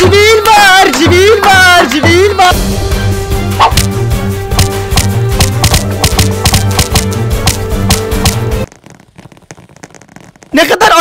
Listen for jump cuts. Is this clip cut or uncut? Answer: cut